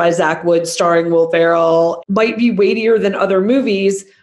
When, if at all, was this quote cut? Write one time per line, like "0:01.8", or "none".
0:02.0